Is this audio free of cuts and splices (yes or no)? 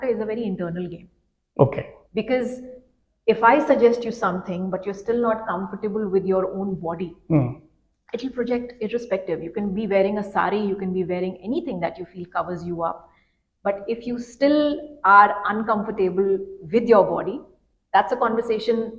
yes